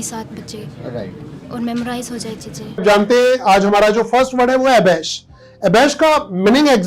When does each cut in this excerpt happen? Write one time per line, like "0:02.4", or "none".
0:02.8

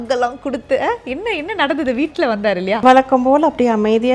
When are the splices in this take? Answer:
0:02.8

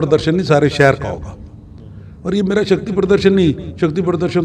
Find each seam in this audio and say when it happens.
none

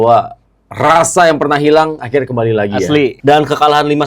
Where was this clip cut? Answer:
0:03.2

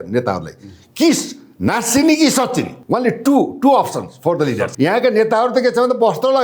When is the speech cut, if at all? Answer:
0:02.8
0:04.7

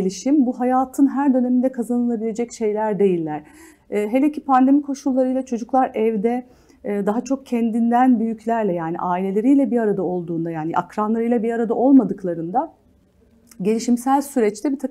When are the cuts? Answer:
none

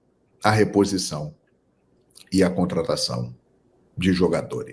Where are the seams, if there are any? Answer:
none

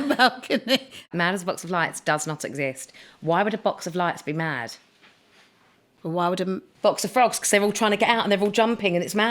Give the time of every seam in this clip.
0:01.1

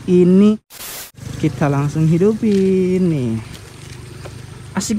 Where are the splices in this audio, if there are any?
0:01.0

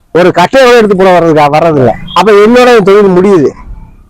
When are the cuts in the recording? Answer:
0:02.0

